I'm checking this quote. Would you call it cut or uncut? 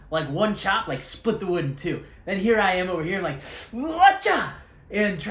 uncut